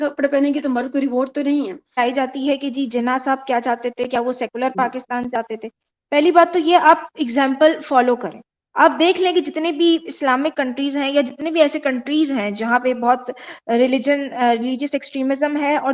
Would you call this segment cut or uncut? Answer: cut